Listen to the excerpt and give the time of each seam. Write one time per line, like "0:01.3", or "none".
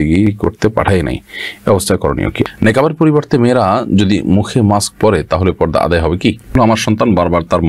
0:02.5
0:06.5